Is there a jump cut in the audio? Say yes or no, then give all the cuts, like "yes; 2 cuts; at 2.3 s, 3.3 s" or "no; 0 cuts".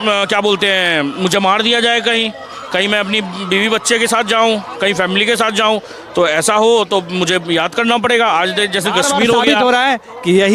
yes; 1 cut; at 9.5 s